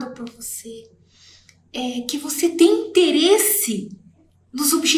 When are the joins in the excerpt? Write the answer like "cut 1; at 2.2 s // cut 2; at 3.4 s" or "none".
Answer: none